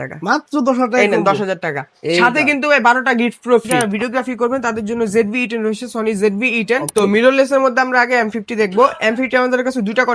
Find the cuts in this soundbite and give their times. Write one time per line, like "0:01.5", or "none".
0:03.8
0:06.9

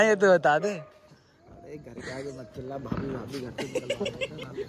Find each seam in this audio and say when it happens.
none

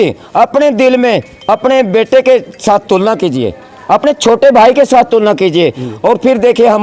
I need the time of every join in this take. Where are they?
0:04.0

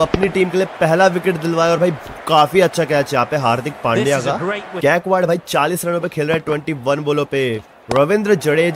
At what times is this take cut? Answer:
0:04.7

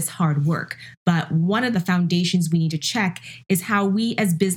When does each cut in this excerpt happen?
0:01.7

